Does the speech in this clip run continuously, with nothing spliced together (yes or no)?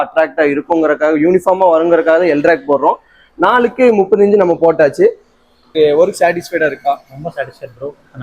no